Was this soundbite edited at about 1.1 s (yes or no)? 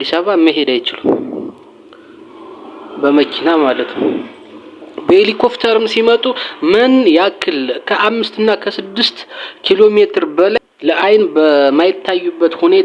no